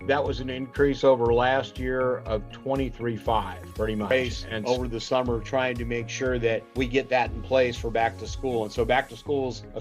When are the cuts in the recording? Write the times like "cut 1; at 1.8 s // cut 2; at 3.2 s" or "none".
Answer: cut 1; at 4.1 s